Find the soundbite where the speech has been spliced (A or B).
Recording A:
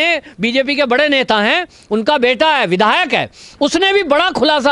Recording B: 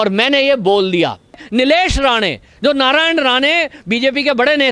B